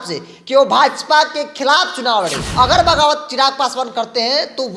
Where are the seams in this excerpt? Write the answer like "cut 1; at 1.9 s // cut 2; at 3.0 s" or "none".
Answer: cut 1; at 2.4 s